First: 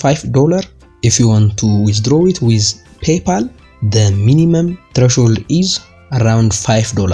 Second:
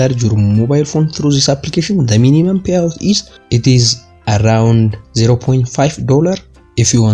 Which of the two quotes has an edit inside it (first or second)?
second